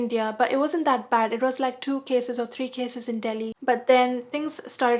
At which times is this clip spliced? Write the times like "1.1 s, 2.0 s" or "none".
3.5 s